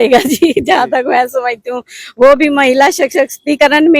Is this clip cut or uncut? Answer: uncut